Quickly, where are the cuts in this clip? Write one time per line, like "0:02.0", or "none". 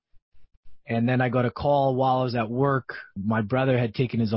0:03.2

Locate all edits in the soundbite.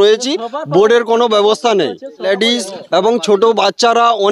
0:02.3

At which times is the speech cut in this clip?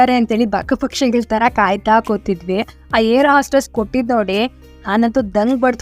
0:02.8

